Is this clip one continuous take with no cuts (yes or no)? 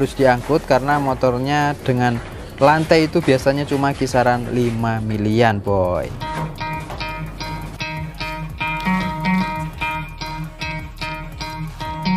yes